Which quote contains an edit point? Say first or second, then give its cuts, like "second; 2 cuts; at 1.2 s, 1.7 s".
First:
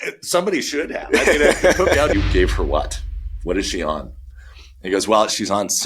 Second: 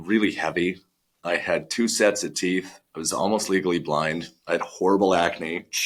first; 1 cut; at 2.1 s